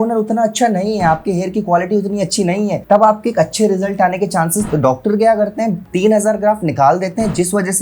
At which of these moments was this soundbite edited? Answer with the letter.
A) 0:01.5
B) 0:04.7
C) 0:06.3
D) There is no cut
B